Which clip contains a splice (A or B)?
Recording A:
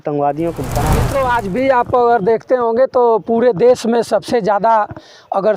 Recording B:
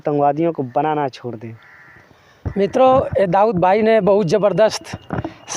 A